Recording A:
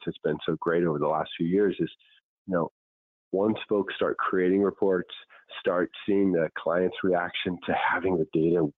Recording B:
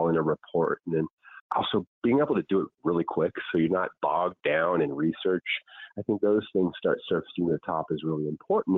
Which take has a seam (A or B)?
B